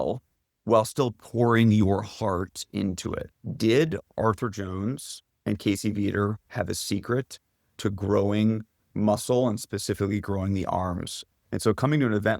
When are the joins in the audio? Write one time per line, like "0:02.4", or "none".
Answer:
0:03.3
0:11.2